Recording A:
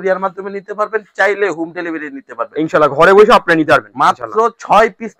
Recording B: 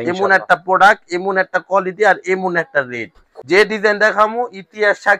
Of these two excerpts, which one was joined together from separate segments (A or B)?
B